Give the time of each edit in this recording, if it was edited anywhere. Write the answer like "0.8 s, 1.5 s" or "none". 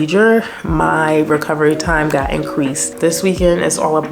2.9 s